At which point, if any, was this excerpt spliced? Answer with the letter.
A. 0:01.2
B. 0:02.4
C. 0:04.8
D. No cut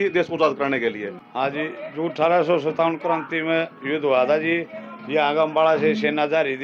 A